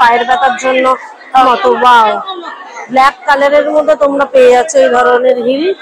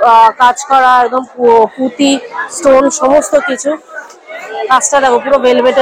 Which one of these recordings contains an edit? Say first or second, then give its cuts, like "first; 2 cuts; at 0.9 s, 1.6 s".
first; 1 cut; at 1.3 s